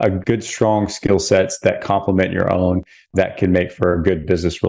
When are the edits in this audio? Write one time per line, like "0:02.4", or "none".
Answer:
0:03.0